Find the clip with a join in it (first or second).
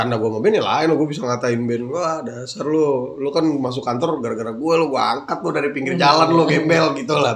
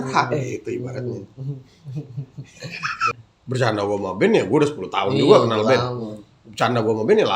second